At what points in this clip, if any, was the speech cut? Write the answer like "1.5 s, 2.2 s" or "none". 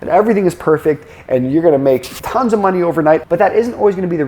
3.2 s